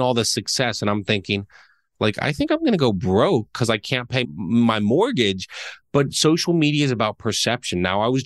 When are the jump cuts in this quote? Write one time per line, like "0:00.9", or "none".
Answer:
none

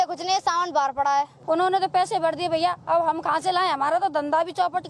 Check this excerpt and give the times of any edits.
0:01.4

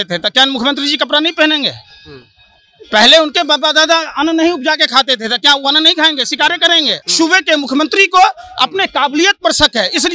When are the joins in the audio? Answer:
0:07.0

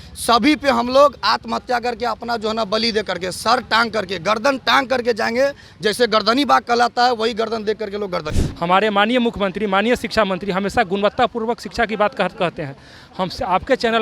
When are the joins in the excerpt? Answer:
0:08.4

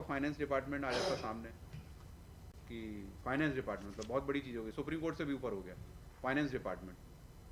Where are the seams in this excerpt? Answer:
none

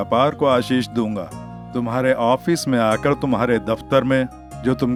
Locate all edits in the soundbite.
none

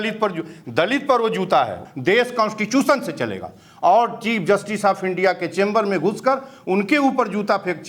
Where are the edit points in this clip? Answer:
0:01.8

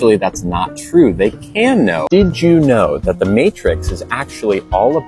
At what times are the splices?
0:02.0

